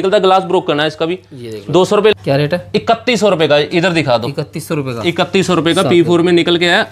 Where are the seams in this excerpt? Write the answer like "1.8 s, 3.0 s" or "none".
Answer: 2.1 s